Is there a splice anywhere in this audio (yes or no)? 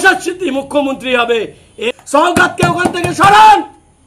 yes